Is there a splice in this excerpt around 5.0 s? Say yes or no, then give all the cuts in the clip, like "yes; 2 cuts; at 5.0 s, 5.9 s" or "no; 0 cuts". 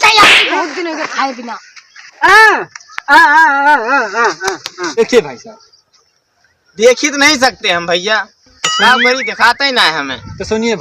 yes; 1 cut; at 5.0 s